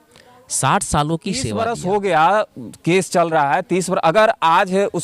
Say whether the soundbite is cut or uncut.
cut